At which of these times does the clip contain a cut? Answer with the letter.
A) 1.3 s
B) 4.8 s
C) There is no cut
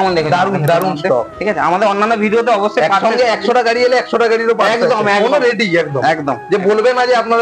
C